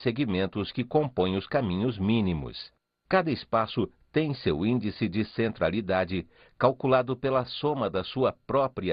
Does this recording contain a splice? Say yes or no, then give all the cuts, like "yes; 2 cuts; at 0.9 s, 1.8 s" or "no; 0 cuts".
no; 0 cuts